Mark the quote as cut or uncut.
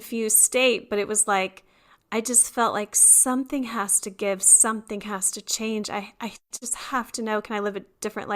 uncut